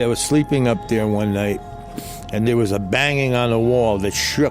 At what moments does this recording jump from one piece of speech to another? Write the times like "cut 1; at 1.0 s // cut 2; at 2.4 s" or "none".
cut 1; at 2.3 s